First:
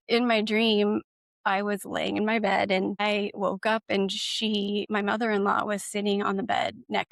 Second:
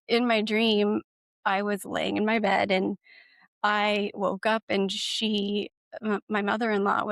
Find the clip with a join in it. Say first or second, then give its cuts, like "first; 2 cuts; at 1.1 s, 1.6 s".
first; 2 cuts; at 3.0 s, 4.9 s